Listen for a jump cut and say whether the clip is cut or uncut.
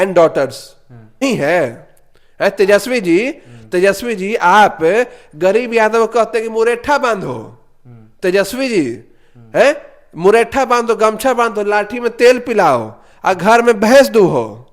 cut